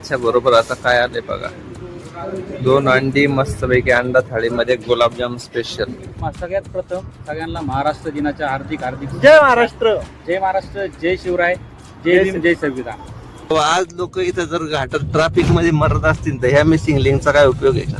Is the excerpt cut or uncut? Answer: cut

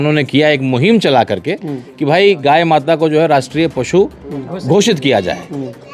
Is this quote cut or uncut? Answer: uncut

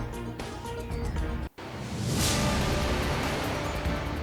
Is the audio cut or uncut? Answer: cut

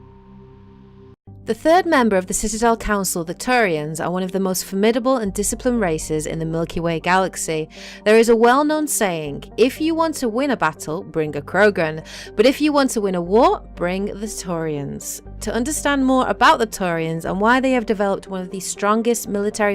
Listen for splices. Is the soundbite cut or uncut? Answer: cut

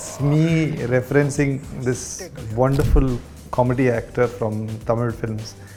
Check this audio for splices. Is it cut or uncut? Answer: uncut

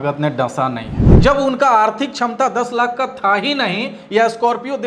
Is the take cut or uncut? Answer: cut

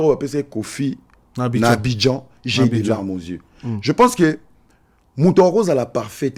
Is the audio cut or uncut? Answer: uncut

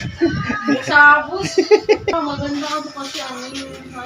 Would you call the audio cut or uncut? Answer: cut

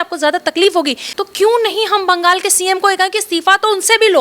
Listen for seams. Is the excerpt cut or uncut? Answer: cut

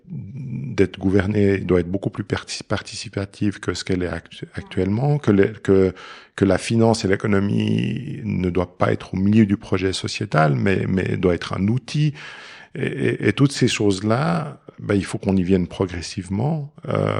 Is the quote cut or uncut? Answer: uncut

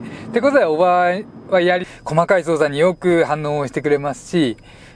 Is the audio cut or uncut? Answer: cut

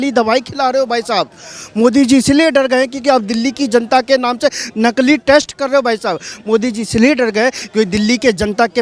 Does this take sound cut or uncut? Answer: uncut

